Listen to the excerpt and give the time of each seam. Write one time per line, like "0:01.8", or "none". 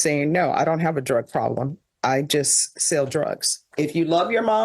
0:03.7